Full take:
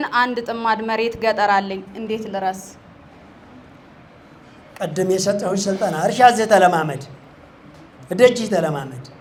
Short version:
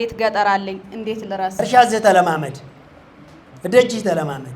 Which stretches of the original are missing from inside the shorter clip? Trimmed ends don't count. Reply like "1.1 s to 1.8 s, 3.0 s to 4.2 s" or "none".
2.6 s to 6.0 s